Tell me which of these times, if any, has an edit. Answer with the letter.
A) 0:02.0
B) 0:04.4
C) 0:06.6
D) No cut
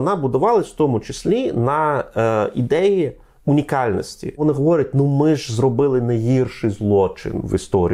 B